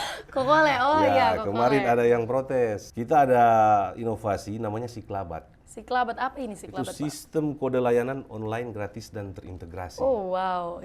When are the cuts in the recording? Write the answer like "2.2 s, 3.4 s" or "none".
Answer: 2.9 s